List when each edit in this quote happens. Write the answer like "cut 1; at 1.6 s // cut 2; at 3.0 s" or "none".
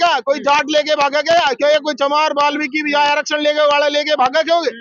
none